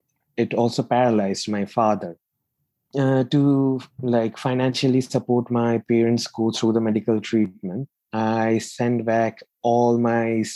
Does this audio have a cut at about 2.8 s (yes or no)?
yes